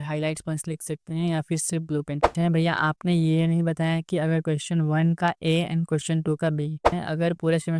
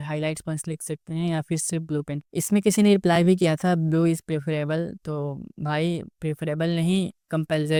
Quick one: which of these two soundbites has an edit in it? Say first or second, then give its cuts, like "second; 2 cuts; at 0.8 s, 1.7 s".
first; 2 cuts; at 2.3 s, 6.9 s